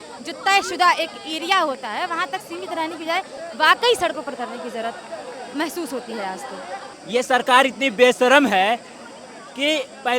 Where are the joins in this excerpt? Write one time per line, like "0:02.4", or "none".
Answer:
0:06.9